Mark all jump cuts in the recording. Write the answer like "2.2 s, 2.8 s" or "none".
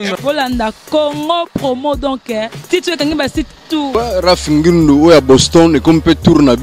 3.9 s